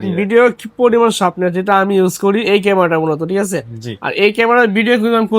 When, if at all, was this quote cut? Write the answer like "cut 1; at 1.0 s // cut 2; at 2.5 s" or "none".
none